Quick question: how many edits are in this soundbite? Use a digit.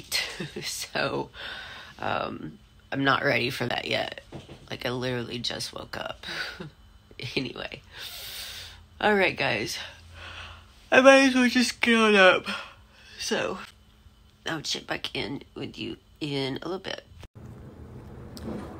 1